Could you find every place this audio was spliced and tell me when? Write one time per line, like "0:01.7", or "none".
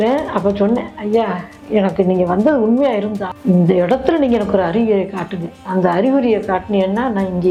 none

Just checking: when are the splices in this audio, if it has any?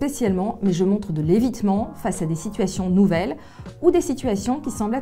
none

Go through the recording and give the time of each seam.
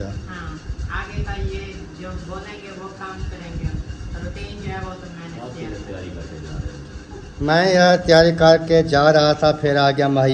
none

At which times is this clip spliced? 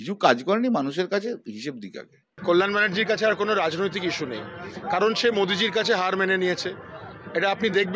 0:02.4

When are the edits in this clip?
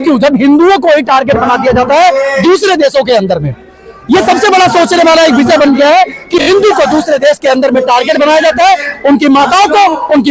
0:06.4

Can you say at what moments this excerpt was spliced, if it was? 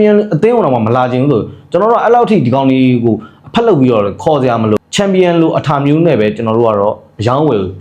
0:04.8

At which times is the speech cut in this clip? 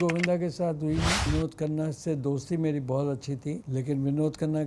0:01.3
0:03.6

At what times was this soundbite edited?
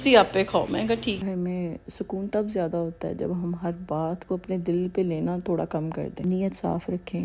0:01.2
0:06.2

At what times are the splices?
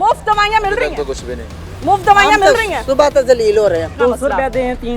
0:03.9

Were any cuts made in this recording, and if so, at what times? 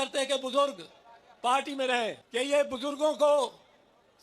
0:02.2

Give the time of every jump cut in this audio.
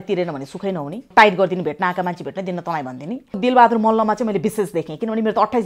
0:01.1
0:03.4

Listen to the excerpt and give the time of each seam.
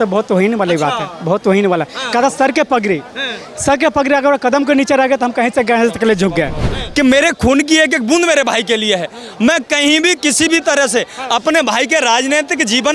0:06.7

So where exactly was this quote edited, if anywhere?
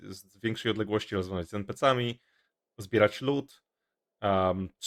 none

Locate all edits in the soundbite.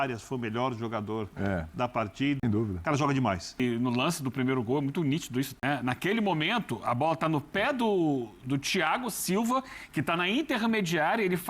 0:02.4
0:03.6
0:05.5

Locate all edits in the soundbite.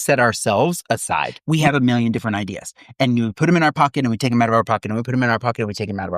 0:01.4

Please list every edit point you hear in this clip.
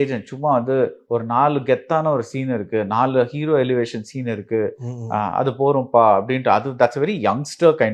none

